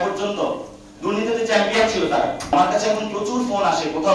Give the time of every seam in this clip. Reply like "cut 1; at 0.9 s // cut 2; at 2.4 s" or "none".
cut 1; at 2.5 s